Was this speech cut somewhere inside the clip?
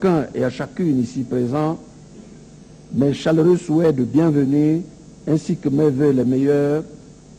no; 0 cuts

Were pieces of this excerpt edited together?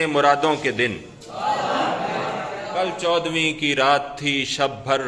yes; 1 cut; at 2.6 s

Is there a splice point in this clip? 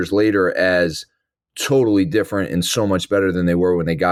no; 0 cuts

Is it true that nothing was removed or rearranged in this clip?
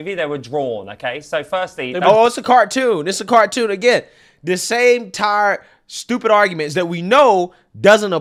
yes; 0 cuts

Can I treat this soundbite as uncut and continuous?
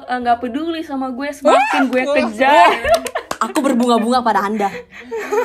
yes; 0 cuts

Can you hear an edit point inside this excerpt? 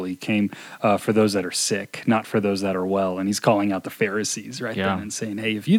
no; 0 cuts

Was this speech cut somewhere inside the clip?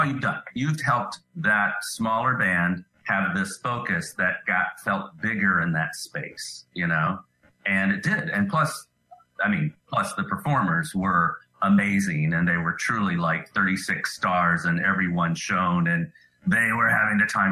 yes; 2 cuts; at 1.3 s, 2.9 s

